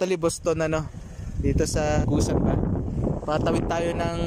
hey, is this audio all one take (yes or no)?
no